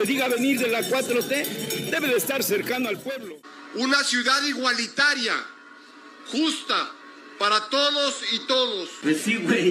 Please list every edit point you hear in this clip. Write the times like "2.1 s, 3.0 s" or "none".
3.1 s